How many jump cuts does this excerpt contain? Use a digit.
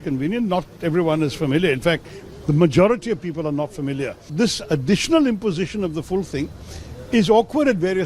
1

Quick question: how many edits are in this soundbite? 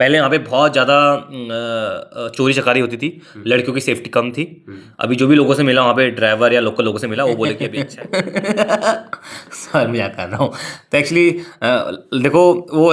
1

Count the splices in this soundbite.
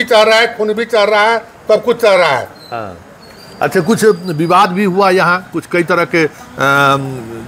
0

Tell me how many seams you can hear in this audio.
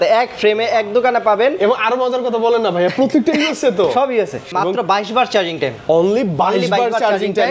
1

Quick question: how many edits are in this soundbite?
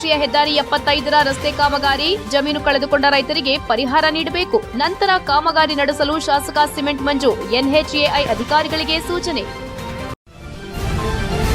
1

